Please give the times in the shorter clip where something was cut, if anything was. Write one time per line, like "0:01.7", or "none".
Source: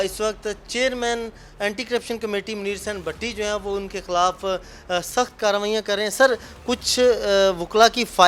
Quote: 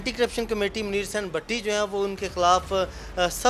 none